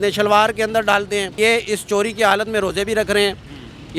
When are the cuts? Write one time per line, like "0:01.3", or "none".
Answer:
0:01.4

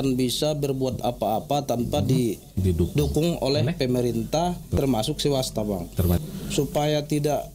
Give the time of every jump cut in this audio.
0:04.7
0:06.2

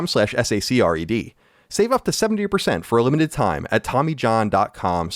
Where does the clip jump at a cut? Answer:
none

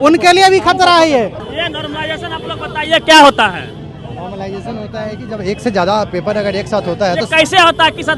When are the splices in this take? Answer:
none

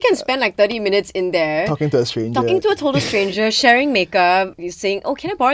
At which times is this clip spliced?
0:04.5

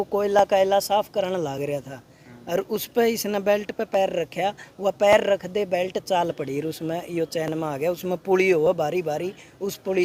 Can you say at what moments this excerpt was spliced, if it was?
none

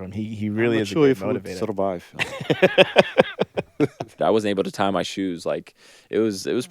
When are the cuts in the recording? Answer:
0:04.2

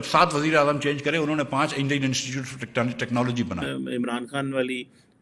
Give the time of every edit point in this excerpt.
0:03.6

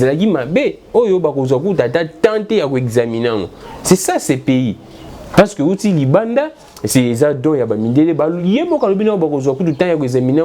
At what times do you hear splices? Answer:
0:00.9

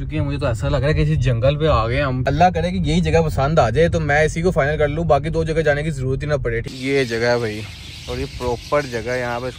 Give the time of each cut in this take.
0:02.2
0:06.7

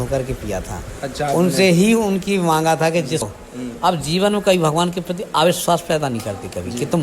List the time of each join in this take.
0:03.2

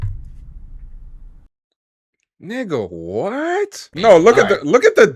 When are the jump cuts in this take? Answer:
0:03.9

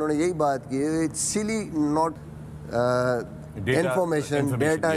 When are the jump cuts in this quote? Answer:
0:02.2

